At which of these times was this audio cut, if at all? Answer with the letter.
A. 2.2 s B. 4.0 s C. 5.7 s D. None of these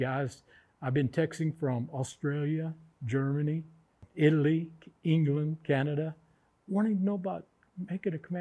B